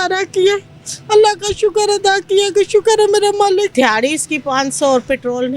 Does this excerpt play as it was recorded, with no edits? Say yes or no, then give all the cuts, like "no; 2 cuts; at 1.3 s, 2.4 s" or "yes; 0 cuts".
no; 1 cut; at 3.7 s